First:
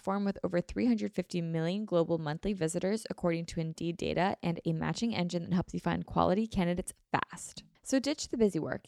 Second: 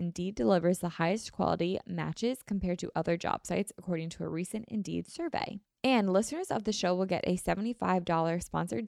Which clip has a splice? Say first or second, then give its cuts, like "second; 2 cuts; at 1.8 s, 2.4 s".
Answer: second; 1 cut; at 5.6 s